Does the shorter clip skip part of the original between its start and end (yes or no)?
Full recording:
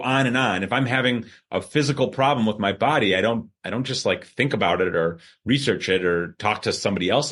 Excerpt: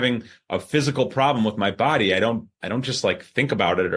no